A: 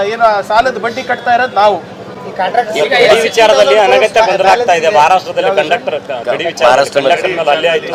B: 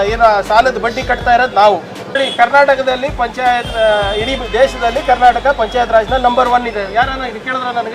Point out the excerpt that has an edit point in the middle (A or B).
B